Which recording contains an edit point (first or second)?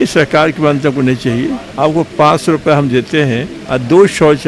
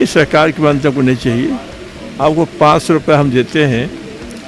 first